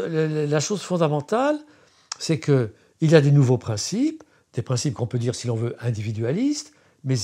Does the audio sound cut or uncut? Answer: uncut